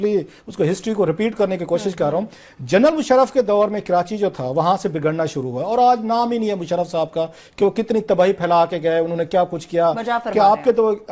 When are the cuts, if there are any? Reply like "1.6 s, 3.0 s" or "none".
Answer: none